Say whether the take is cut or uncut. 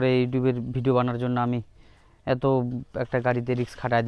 uncut